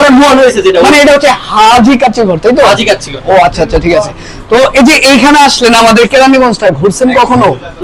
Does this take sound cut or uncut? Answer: uncut